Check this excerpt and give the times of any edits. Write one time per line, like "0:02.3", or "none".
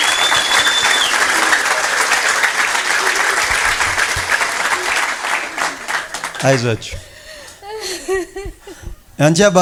none